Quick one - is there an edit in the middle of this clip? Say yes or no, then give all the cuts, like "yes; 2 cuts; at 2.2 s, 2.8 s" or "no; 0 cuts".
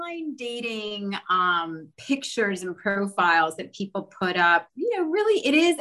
no; 0 cuts